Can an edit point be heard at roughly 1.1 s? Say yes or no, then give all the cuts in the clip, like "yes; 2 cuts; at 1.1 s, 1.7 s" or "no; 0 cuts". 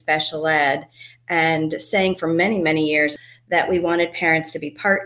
no; 1 cut; at 3.2 s